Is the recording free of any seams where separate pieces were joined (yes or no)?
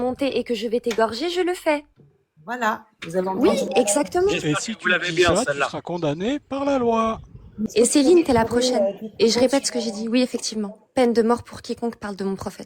no